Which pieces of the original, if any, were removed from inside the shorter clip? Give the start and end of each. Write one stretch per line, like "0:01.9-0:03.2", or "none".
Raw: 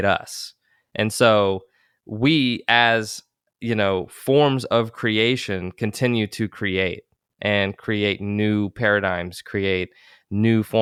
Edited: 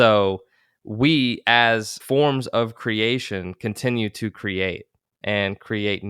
0:03.2-0:04.1